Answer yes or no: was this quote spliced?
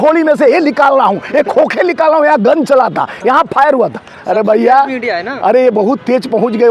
no